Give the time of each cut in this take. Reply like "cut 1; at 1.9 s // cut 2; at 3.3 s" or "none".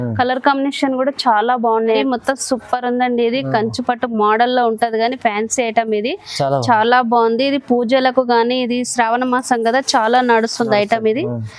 cut 1; at 2.0 s